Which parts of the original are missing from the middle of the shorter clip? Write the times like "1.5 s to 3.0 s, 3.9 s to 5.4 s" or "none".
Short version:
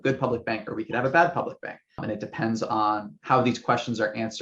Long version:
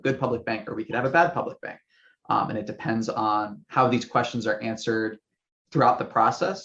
2.0 s to 2.5 s